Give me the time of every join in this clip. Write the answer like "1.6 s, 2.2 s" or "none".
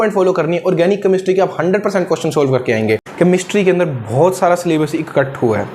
3.1 s